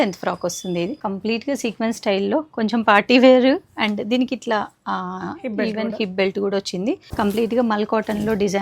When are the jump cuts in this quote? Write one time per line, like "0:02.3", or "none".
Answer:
0:01.0
0:07.1